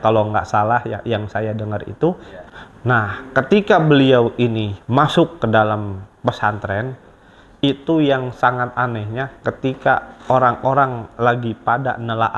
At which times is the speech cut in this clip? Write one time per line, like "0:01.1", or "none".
0:02.3